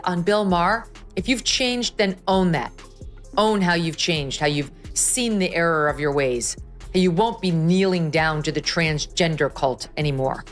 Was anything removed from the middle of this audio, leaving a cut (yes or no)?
yes